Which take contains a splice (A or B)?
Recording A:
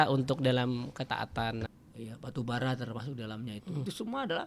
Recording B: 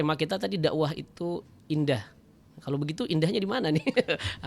A